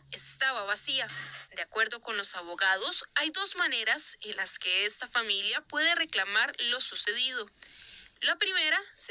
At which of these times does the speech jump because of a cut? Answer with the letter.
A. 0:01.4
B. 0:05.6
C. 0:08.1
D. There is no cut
A